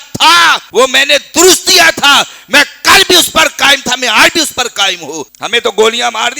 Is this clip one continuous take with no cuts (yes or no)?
no